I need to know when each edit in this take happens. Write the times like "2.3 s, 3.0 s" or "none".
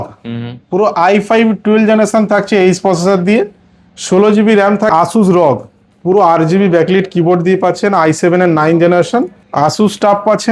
4.9 s, 9.4 s